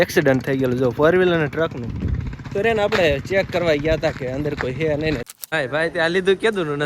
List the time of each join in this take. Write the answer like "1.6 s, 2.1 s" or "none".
5.3 s